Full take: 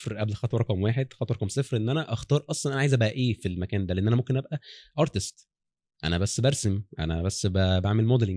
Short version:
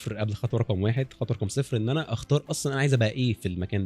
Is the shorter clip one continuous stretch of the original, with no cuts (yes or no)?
yes